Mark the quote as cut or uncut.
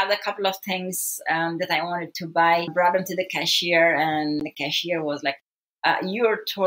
cut